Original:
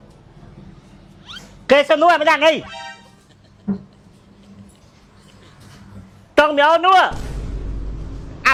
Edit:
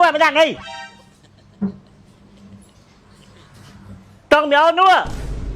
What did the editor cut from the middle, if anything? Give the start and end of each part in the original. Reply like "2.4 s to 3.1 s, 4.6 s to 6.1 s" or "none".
none